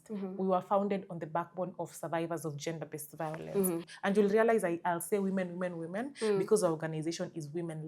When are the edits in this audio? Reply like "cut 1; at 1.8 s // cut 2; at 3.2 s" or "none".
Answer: cut 1; at 3.9 s